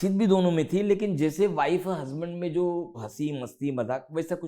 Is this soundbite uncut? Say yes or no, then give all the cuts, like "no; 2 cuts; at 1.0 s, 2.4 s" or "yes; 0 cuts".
no; 1 cut; at 3.1 s